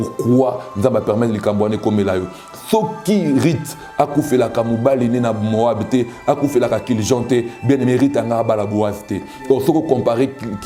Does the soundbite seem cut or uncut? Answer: uncut